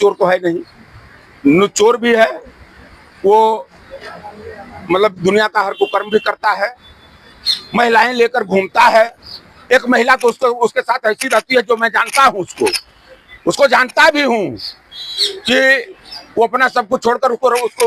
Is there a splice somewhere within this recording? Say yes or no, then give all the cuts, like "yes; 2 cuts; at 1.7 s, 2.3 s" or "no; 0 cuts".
no; 0 cuts